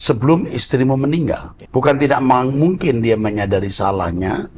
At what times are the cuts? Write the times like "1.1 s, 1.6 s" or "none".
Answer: 1.5 s